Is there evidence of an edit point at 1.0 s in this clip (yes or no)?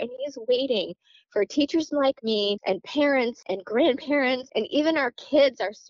no